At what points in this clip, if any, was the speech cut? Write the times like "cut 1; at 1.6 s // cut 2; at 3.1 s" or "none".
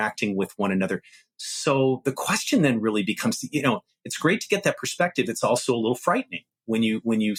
none